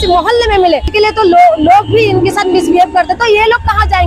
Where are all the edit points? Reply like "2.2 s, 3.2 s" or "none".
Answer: 0.9 s

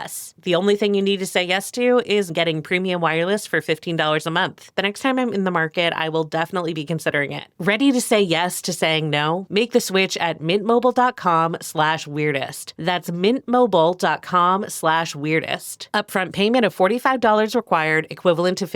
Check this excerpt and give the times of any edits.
2.3 s, 4.8 s, 7.4 s

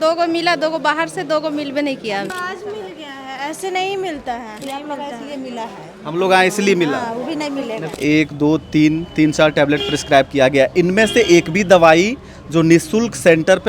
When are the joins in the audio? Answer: 2.3 s, 4.6 s, 7.9 s

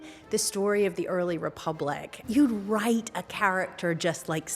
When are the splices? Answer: 2.1 s

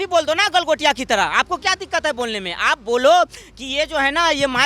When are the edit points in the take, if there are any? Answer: none

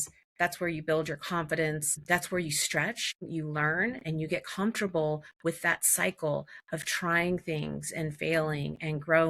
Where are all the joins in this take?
2.0 s, 3.3 s

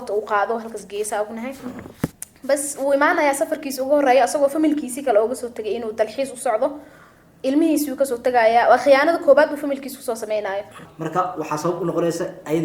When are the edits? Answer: 10.8 s

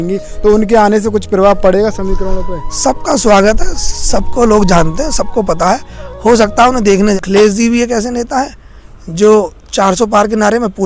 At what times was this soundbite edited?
7.2 s

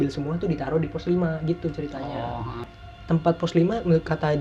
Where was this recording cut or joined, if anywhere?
2.7 s

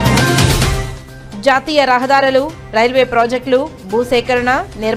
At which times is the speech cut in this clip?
none

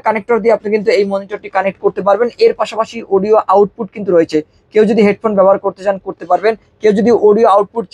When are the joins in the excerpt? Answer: none

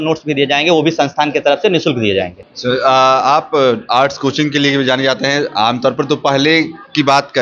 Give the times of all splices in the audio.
none

